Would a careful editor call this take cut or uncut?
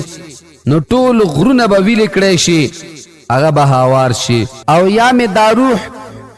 cut